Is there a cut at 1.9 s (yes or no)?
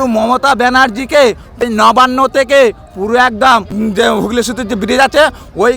yes